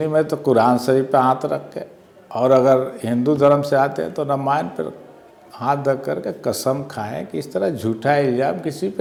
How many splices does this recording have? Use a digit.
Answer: 0